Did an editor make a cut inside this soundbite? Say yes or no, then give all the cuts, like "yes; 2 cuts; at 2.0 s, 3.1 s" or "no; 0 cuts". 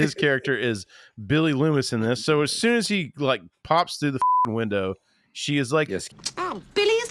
yes; 1 cut; at 6.1 s